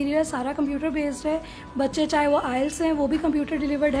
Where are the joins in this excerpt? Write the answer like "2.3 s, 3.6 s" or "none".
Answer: none